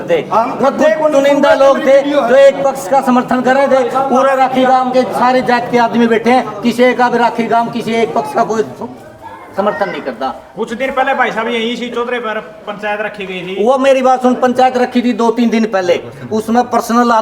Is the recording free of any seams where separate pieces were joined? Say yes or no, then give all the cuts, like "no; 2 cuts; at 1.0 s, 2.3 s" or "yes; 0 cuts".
yes; 0 cuts